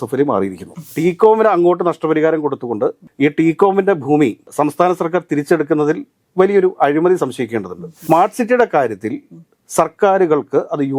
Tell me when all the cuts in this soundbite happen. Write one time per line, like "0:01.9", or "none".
0:00.9
0:08.0